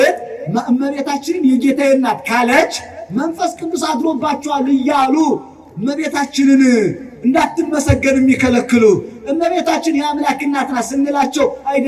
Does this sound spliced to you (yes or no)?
no